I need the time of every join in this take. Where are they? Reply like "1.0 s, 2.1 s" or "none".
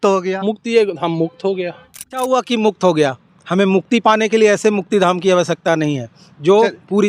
2.2 s